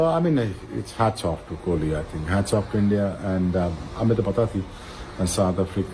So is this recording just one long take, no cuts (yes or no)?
yes